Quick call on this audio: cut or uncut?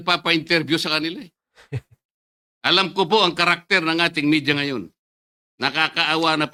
uncut